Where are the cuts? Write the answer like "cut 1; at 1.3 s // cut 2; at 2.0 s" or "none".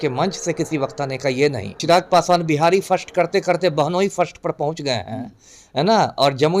cut 1; at 1.8 s

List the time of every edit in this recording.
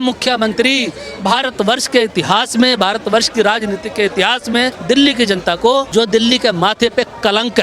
cut 1; at 4.8 s // cut 2; at 5.9 s

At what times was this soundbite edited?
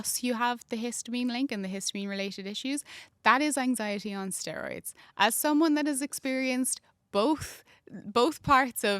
none

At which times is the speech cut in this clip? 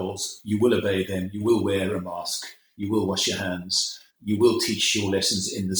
cut 1; at 4.1 s

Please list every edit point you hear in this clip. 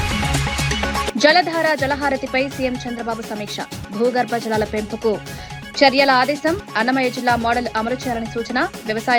none

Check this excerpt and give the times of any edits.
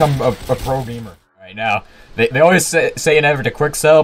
cut 1; at 1.6 s

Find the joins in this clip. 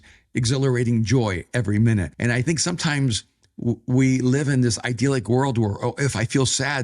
cut 1; at 2.1 s

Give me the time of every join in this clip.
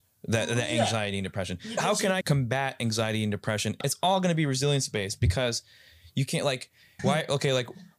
cut 1; at 2.2 s // cut 2; at 3.8 s // cut 3; at 6.8 s

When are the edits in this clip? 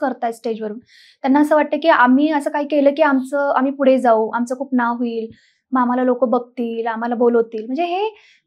none

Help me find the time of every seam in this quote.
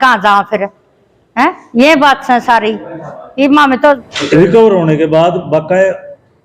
cut 1; at 4.0 s

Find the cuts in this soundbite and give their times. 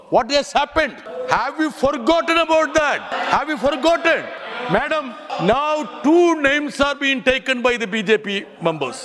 cut 1; at 1.1 s // cut 2; at 3.1 s // cut 3; at 4.4 s // cut 4; at 5.2 s

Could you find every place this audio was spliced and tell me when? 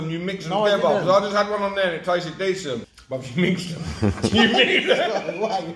cut 1; at 2.9 s

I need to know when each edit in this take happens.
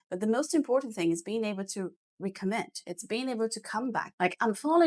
none

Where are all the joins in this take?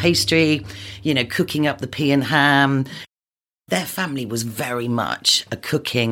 cut 1; at 3.2 s

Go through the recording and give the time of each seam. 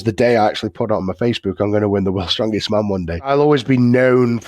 cut 1; at 3.3 s

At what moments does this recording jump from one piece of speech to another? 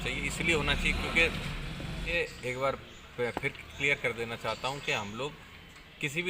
cut 1; at 2.1 s

